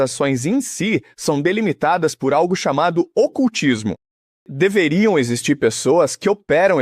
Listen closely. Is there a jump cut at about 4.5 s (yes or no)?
yes